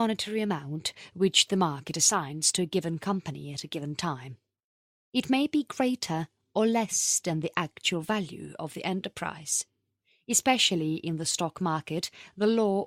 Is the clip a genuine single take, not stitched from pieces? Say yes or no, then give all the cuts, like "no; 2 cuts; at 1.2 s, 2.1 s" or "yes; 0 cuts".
no; 1 cut; at 2.2 s